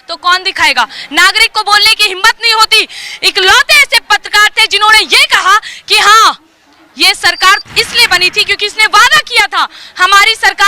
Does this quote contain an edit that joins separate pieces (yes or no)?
no